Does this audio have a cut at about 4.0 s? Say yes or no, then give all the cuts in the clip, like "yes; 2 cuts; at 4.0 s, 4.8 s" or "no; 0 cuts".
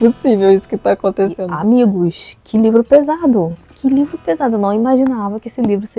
no; 1 cut; at 1.4 s